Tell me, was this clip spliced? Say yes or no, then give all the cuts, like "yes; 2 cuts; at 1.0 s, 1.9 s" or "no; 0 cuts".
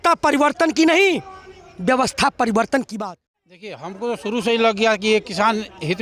yes; 1 cut; at 2.9 s